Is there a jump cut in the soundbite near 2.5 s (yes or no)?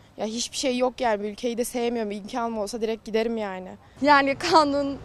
no